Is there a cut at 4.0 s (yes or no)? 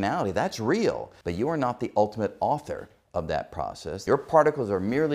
yes